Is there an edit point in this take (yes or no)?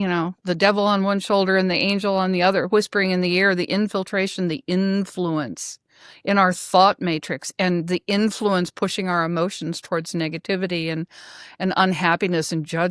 no